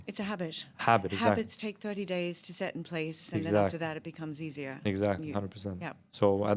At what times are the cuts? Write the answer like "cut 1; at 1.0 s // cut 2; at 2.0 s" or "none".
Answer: none